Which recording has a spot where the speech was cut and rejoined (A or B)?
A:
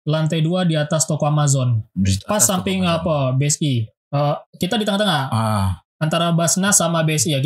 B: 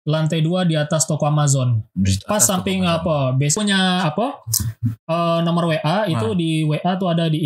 B